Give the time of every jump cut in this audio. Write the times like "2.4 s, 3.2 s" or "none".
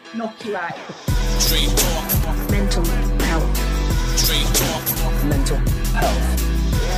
0.9 s